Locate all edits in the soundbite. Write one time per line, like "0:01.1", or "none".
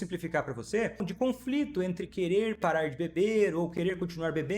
0:01.1